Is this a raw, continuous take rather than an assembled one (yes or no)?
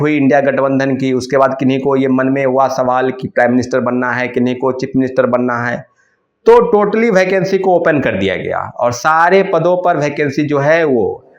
yes